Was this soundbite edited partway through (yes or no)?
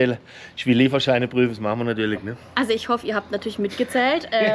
no